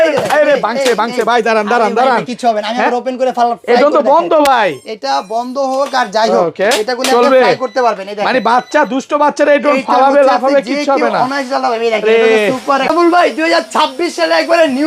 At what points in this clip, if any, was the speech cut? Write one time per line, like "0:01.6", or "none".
0:12.8